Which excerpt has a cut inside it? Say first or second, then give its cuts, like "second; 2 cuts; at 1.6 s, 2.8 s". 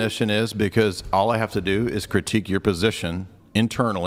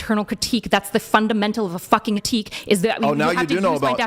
second; 1 cut; at 2.2 s